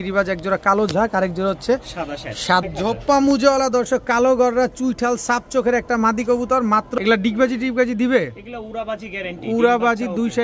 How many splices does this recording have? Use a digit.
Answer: 2